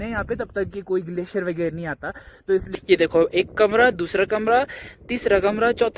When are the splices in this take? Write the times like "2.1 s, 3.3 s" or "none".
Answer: 2.7 s